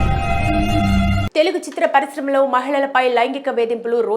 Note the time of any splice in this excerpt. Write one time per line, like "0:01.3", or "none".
none